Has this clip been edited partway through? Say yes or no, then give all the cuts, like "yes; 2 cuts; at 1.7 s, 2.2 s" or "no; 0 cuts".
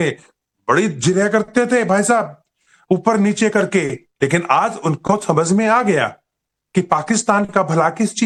no; 0 cuts